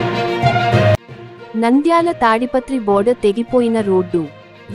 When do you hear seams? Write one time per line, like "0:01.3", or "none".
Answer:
0:01.0